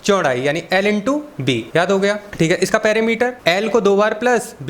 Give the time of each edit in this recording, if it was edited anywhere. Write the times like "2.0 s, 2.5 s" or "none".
1.7 s, 2.3 s, 3.4 s